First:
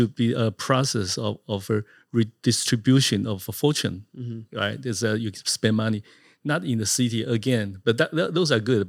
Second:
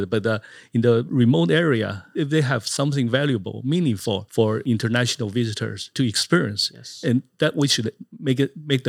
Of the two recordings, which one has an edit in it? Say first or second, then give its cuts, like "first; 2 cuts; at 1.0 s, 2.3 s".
second; 3 cuts; at 2.1 s, 4.5 s, 5.9 s